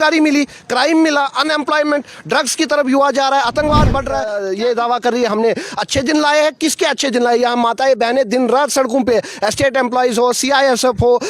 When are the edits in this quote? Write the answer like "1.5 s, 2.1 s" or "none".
4.3 s